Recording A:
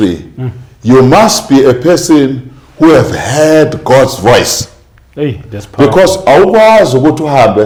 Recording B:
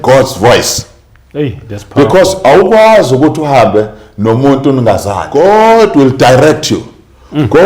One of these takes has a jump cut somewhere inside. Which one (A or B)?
B